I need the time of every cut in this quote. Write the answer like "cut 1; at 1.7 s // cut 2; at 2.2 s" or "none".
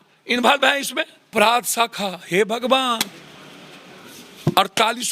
cut 1; at 1.3 s